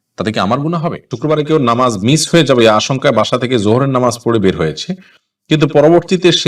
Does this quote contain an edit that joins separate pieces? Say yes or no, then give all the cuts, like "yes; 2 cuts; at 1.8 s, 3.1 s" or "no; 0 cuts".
yes; 1 cut; at 1.1 s